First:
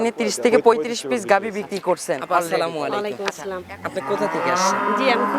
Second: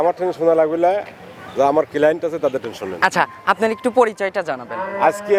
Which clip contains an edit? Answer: first; 1 cut; at 2.4 s

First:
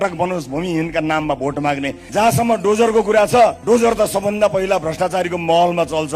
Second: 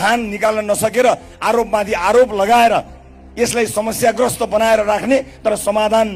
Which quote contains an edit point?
first; 2 cuts; at 2.0 s, 3.6 s

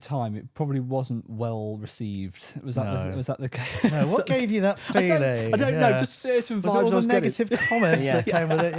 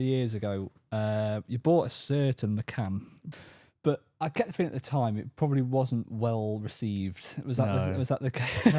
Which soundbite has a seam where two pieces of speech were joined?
second; 1 cut; at 3.2 s

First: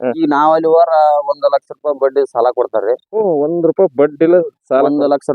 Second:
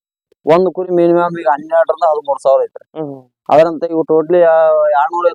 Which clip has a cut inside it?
first; 1 cut; at 1.3 s

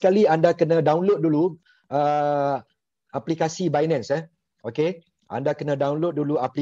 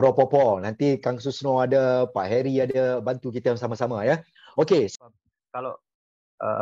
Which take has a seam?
second; 1 cut; at 4.9 s

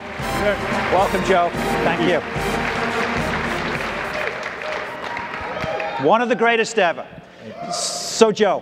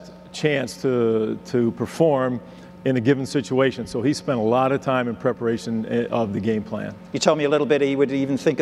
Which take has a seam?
first; 2 cuts; at 3.5 s, 7.6 s

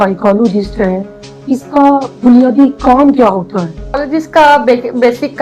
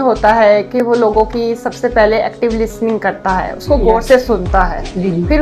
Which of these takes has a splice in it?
first; 1 cut; at 4.0 s

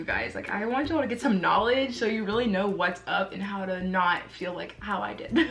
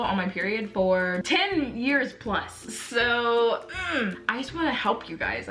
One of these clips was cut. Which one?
second; 2 cuts; at 1.2 s, 4.2 s

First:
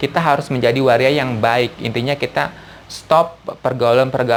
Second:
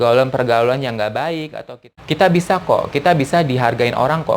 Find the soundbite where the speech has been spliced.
second; 1 cut; at 1.5 s

